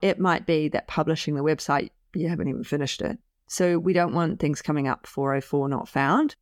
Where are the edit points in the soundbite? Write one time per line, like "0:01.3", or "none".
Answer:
none